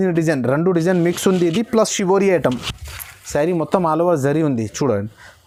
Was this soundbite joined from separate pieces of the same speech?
no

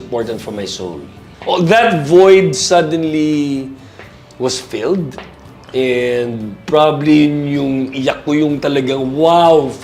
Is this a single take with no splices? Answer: no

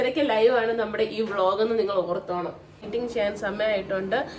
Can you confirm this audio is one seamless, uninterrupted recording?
no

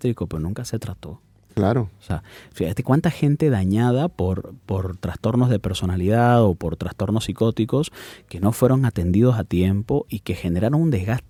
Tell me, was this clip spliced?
no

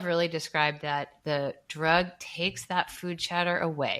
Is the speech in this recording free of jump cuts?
no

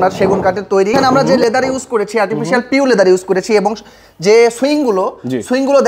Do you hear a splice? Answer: yes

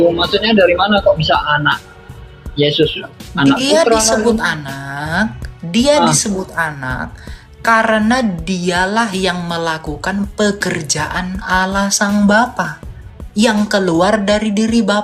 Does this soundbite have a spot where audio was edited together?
no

